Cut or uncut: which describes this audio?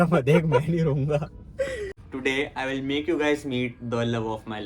cut